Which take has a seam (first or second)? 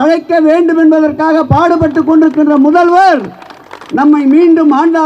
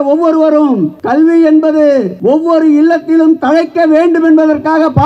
second